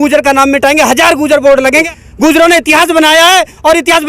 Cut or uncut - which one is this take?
cut